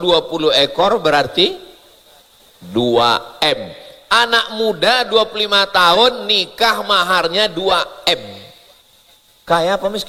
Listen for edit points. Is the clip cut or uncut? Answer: uncut